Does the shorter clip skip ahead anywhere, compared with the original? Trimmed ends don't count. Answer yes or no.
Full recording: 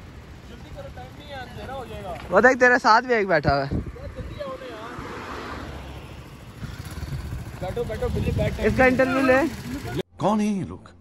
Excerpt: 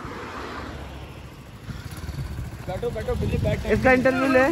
no